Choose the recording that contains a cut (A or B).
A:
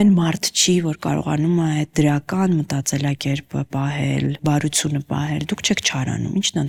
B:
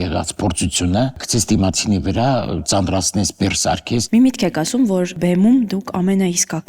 B